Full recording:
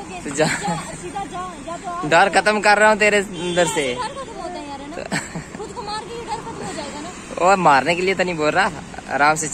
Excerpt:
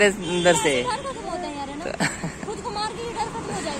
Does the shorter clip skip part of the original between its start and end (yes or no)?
no